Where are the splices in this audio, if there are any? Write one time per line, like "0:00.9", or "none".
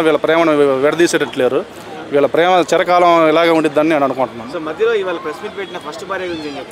none